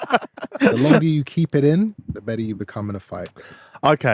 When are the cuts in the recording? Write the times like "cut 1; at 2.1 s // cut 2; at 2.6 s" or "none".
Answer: cut 1; at 1.0 s // cut 2; at 2.0 s